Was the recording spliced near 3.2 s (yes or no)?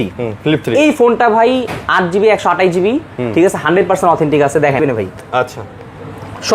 no